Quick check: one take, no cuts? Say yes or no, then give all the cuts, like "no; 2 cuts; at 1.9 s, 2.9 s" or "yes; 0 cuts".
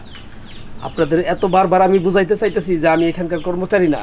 yes; 0 cuts